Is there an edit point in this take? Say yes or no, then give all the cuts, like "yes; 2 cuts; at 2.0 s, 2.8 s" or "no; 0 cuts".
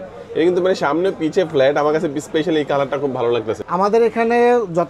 yes; 1 cut; at 3.6 s